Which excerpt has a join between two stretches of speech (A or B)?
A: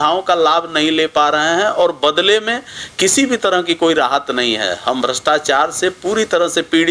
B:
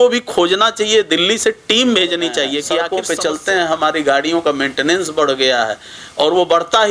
B